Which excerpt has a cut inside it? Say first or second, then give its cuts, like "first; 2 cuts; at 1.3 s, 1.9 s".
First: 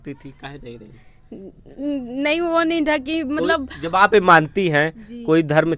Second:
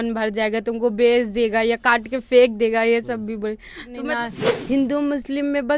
second; 1 cut; at 4.0 s